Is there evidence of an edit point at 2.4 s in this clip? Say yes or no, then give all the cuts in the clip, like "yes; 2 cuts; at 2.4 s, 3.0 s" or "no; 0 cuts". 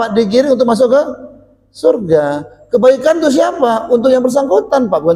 no; 0 cuts